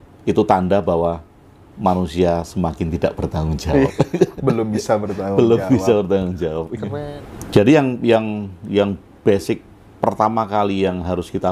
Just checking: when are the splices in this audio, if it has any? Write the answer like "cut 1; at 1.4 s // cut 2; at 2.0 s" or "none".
cut 1; at 6.9 s